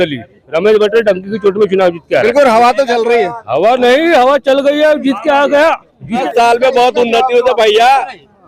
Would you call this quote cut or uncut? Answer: cut